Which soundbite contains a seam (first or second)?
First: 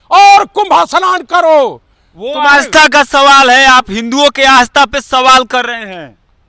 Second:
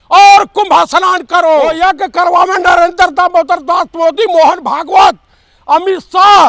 second